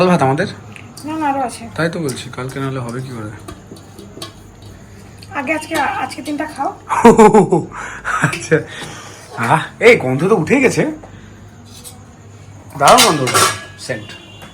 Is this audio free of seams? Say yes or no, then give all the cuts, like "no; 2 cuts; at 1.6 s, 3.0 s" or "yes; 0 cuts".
yes; 0 cuts